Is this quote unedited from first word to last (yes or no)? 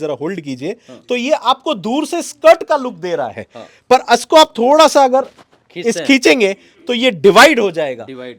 yes